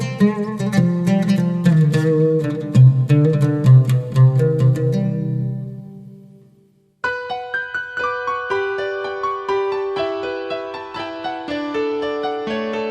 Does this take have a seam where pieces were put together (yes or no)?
yes